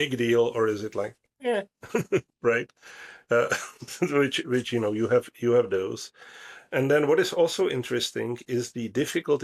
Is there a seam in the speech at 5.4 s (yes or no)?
no